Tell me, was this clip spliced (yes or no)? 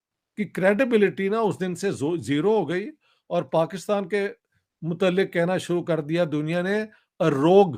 no